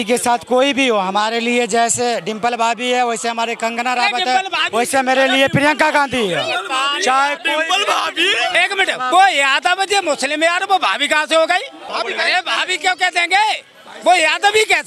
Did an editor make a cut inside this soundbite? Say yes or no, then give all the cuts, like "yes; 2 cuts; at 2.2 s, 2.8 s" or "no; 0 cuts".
no; 0 cuts